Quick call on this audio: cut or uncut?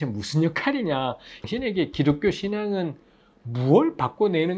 cut